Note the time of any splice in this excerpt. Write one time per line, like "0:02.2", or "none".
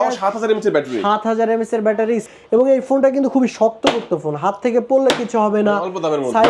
0:02.3